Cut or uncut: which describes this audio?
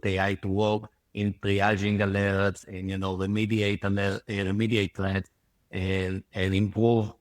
uncut